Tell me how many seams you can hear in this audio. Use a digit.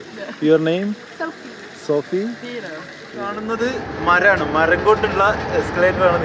1